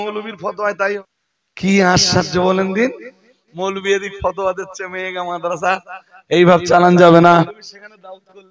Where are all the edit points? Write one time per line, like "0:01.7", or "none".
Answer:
0:01.0
0:07.5

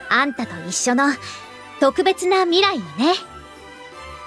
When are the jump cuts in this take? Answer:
0:03.2

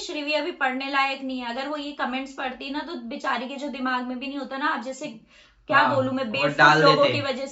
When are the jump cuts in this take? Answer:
none

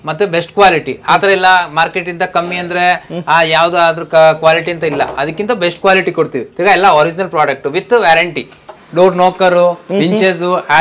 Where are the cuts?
0:08.8

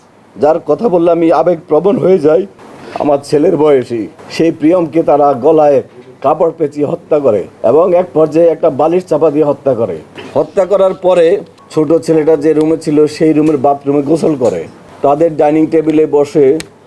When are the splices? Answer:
0:02.6
0:07.5
0:11.6
0:14.8

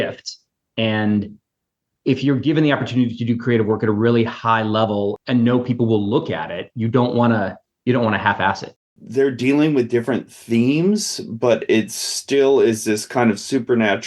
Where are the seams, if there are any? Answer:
0:05.2
0:08.7

